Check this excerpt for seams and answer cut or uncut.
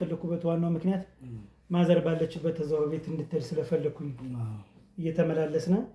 uncut